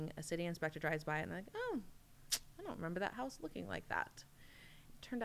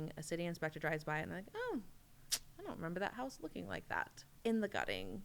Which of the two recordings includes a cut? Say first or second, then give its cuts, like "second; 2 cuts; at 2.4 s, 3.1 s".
second; 1 cut; at 4.2 s